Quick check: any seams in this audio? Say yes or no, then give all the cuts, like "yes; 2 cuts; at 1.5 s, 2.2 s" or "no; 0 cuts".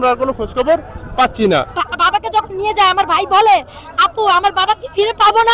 yes; 1 cut; at 1.8 s